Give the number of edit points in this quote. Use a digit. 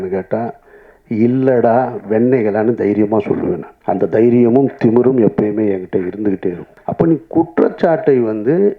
2